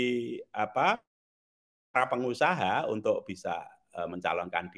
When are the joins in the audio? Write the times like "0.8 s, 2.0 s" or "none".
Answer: none